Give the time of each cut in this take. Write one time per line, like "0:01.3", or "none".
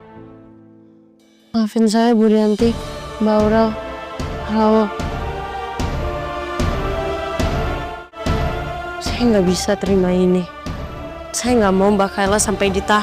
0:08.1